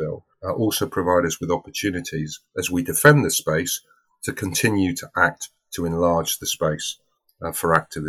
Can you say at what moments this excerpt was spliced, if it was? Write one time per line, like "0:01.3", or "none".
none